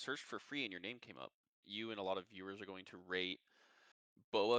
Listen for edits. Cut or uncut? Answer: cut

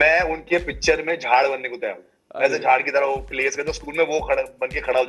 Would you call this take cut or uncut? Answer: uncut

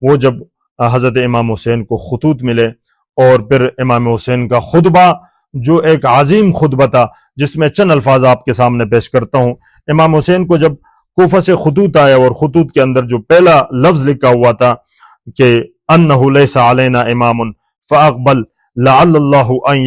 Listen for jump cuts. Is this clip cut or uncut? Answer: uncut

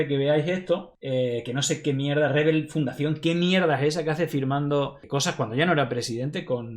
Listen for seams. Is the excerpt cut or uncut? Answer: cut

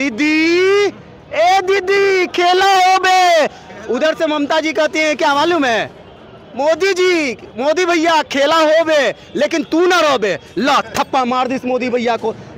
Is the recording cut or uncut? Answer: uncut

